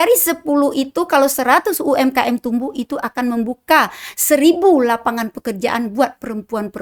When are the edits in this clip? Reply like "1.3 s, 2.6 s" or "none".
none